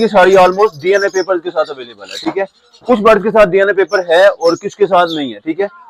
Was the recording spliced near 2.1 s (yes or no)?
no